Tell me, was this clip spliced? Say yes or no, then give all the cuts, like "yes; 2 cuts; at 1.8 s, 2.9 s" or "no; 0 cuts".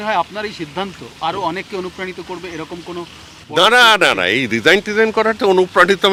no; 0 cuts